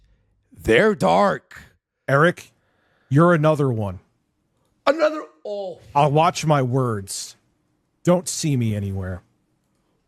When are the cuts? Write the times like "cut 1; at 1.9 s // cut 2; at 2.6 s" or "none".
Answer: cut 1; at 2.0 s